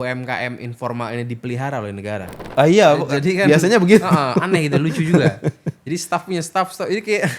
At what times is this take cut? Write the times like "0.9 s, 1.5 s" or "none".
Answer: 2.4 s